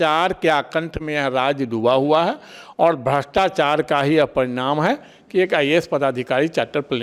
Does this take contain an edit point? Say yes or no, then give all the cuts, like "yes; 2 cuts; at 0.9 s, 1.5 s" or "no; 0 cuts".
no; 0 cuts